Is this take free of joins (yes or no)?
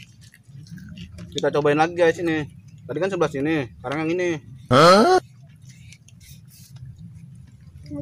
no